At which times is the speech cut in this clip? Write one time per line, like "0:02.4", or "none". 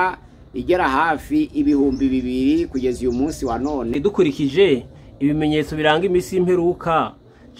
0:03.9